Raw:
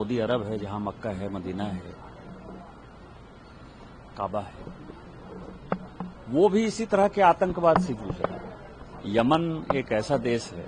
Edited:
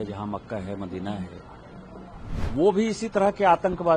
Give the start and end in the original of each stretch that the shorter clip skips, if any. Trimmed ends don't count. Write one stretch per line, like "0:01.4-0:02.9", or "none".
0:02.9-0:06.2